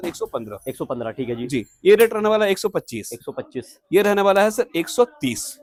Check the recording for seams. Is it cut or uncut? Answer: uncut